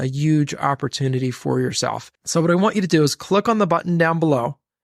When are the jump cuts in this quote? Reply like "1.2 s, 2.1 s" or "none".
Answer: 2.1 s